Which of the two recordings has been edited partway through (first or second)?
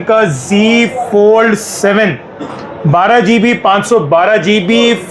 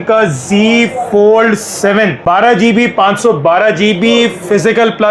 second